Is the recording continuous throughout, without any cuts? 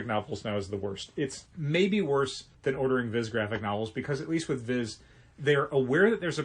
no; 2 cuts; at 1.5 s, 2.5 s

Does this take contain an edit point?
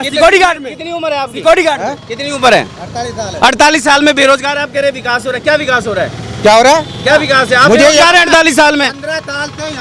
no; 0 cuts

